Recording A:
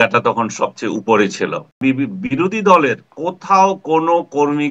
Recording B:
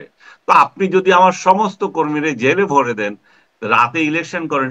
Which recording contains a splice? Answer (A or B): A